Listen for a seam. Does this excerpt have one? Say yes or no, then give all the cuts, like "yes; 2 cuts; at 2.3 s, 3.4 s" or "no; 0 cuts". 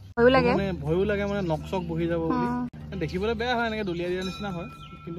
no; 0 cuts